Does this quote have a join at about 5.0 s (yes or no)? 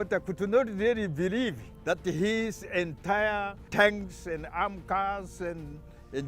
no